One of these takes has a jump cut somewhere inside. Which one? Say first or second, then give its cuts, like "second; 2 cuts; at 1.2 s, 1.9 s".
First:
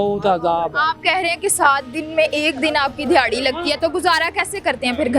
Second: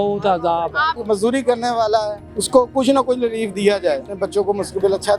second; 2 cuts; at 1.0 s, 4.1 s